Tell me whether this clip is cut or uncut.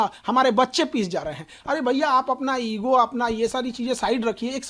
uncut